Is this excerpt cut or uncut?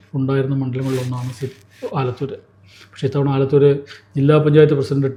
uncut